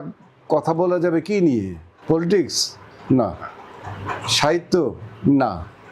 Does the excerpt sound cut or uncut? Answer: cut